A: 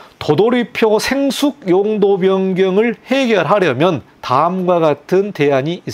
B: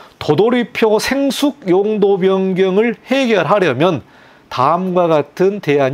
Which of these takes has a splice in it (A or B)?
A